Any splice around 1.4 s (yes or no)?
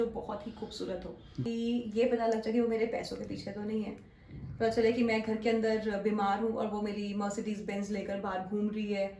yes